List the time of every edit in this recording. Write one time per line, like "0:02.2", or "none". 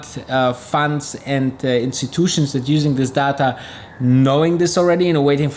none